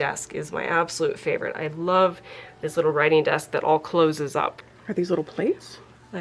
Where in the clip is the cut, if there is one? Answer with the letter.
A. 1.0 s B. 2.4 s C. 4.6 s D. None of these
C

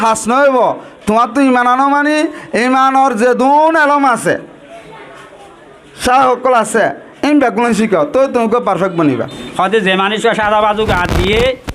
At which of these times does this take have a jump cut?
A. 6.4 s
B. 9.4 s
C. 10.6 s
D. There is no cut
B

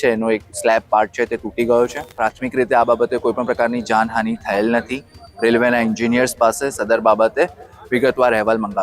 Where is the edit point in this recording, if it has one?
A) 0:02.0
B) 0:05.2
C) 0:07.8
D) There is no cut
A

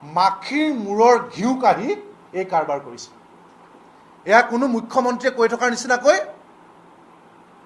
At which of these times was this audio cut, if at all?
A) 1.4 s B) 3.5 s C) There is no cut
C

